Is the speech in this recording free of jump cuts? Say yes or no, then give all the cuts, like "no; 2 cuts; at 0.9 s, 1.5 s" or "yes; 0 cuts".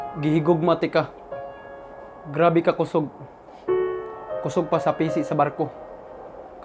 yes; 0 cuts